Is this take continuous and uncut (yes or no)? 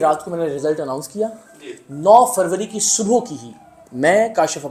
yes